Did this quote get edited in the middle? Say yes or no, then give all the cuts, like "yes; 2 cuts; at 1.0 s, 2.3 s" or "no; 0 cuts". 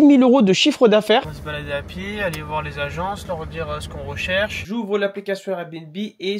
yes; 2 cuts; at 1.2 s, 4.6 s